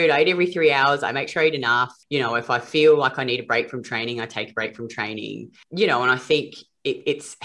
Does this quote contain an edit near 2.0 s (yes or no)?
yes